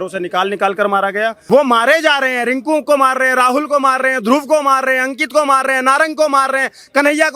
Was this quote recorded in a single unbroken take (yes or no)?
no